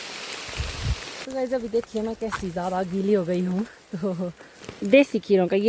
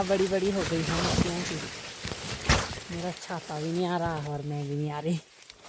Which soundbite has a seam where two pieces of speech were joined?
first; 2 cuts; at 1.4 s, 4.5 s

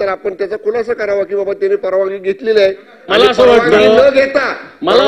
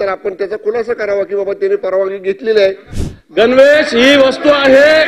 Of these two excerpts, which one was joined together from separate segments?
second; 1 cut; at 2.9 s

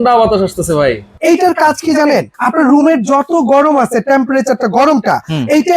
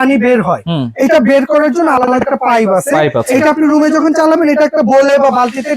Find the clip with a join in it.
first; 2 cuts; at 1.1 s, 2.4 s

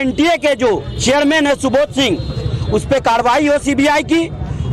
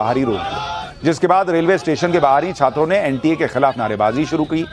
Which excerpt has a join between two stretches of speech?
first; 1 cut; at 0.9 s

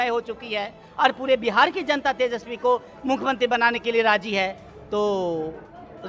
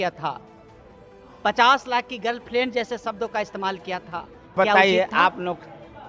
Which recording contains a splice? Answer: second; 1 cut; at 4.5 s

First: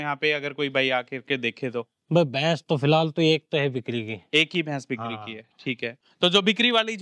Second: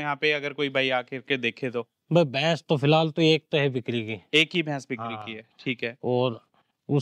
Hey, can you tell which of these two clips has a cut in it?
first; 1 cut; at 5.9 s

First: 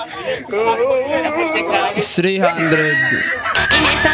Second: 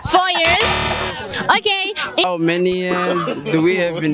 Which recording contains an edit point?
second; 1 cut; at 2.2 s

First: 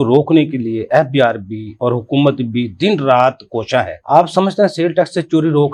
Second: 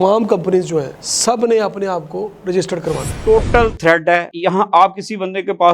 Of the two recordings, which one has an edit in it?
second; 2 cuts; at 0.9 s, 3.1 s

